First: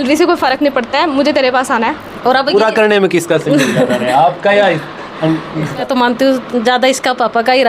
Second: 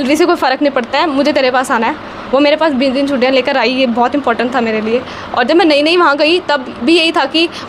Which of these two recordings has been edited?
first; 2 cuts; at 2.1 s, 5.8 s

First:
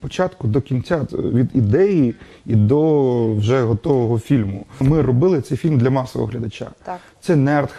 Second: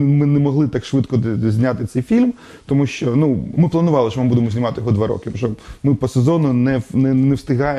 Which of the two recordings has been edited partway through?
first; 2 cuts; at 1.1 s, 4.8 s

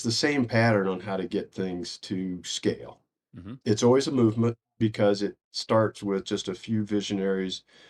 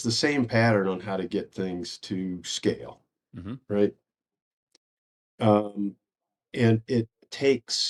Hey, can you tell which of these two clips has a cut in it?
first; 2 cuts; at 3.6 s, 4.8 s

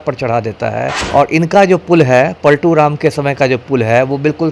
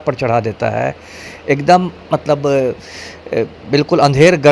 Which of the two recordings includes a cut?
first; 1 cut; at 0.9 s

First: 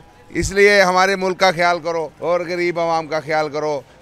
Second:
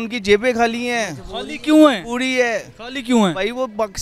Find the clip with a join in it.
first; 1 cut; at 2.1 s

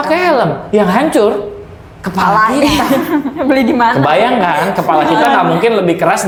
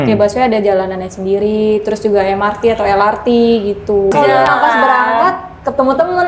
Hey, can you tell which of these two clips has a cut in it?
second; 1 cut; at 4.1 s

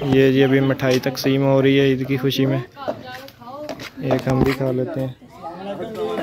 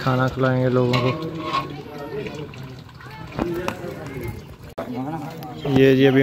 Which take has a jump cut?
second; 1 cut; at 4.7 s

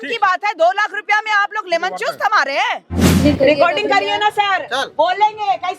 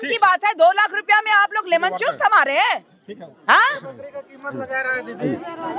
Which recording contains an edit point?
first; 1 cut; at 3.2 s

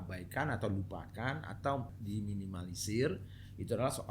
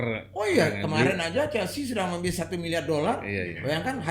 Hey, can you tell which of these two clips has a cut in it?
first; 1 cut; at 1.9 s

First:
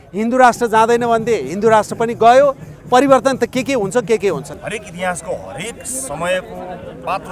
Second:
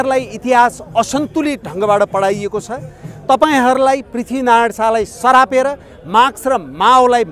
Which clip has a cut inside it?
first; 1 cut; at 4.5 s

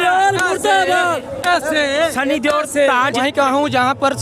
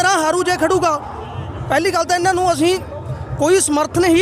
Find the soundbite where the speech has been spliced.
first; 1 cut; at 3.2 s

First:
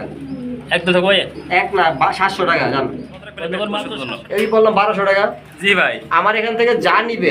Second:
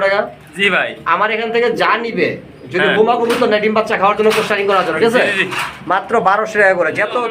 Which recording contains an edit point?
first; 1 cut; at 3.9 s

